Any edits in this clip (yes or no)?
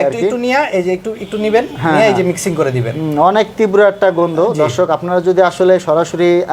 no